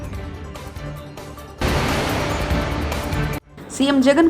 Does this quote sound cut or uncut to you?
cut